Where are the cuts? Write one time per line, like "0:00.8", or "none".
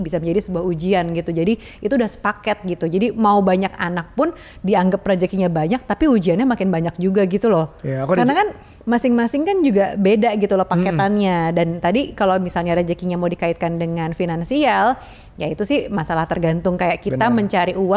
none